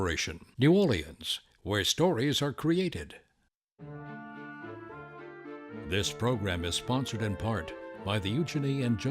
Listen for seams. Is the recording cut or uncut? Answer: cut